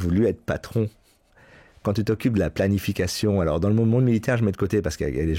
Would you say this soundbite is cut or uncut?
uncut